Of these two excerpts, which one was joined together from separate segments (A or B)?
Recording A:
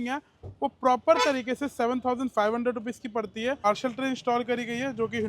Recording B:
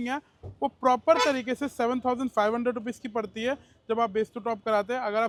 A